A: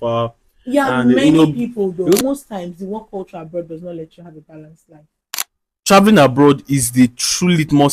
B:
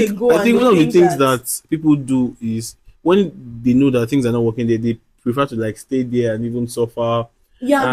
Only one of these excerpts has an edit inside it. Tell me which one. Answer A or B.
A